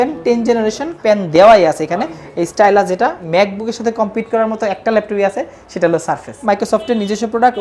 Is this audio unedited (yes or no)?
no